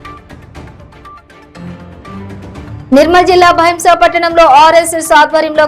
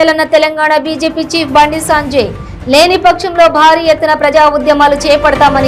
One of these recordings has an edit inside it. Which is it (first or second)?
first